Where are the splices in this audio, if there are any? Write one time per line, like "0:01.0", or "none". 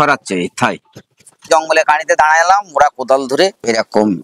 0:01.4